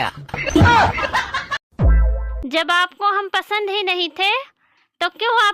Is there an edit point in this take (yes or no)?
yes